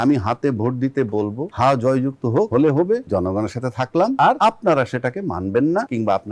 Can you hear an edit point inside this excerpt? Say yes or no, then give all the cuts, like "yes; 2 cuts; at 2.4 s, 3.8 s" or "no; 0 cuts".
no; 0 cuts